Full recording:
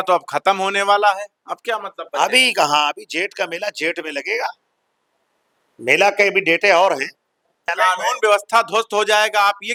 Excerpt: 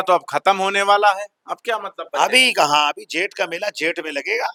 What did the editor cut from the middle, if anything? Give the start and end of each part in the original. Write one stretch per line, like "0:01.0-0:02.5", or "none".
none